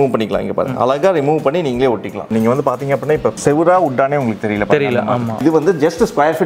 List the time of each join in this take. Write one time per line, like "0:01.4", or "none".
0:02.3
0:03.4
0:05.4